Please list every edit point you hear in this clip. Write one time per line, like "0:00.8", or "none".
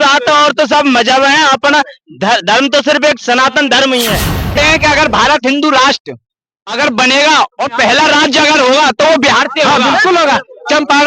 0:04.5